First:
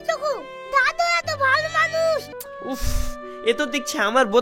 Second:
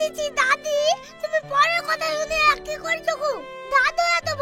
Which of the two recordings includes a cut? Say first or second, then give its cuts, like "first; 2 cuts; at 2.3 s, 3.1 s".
first; 1 cut; at 2.4 s